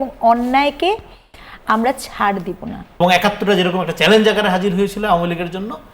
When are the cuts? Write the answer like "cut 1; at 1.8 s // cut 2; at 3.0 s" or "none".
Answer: cut 1; at 3.0 s